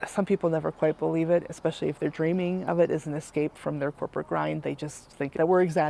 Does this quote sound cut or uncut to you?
uncut